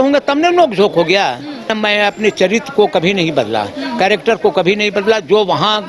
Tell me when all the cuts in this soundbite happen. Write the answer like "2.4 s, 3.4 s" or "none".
1.7 s